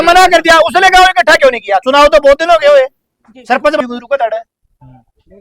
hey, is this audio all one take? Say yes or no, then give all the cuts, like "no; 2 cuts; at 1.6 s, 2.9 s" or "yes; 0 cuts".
no; 1 cut; at 3.8 s